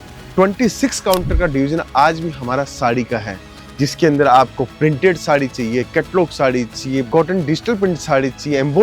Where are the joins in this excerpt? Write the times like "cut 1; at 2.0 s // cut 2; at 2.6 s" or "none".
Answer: cut 1; at 7.1 s